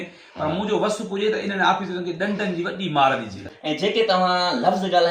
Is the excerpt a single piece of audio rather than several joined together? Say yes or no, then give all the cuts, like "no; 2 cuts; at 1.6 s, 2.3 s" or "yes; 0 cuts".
no; 1 cut; at 3.5 s